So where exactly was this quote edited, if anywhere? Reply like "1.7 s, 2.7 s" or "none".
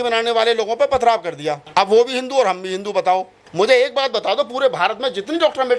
1.5 s, 3.4 s